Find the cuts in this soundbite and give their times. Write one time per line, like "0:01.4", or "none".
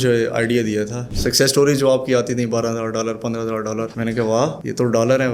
0:01.0